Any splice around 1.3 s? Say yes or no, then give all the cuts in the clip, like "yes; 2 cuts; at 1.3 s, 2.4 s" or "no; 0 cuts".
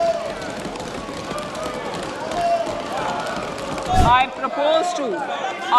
no; 1 cut; at 3.8 s